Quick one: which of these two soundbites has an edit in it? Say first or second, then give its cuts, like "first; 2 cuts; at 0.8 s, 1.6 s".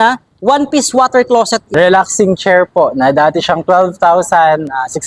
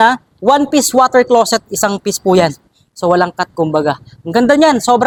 first; 1 cut; at 1.7 s